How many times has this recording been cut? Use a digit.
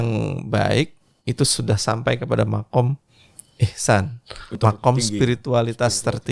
1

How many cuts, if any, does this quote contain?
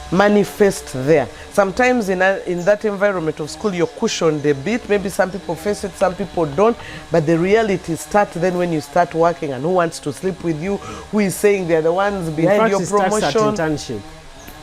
0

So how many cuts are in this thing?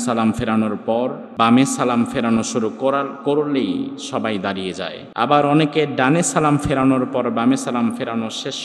2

